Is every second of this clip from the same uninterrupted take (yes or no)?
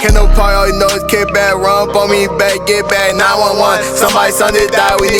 yes